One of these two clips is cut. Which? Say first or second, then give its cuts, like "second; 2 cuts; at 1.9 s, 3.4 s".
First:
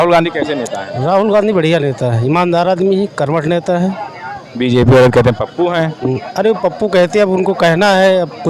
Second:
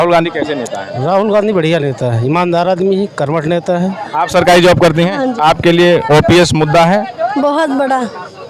second; 1 cut; at 4.0 s